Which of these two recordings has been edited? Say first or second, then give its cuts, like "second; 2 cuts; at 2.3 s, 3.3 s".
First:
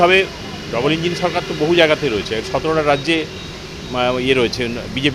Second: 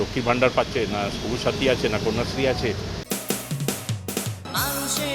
second; 1 cut; at 3.0 s